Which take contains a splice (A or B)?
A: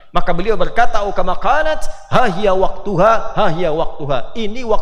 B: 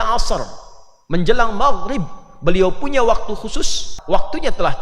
B